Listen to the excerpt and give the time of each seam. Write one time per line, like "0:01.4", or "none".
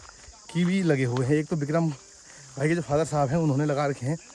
none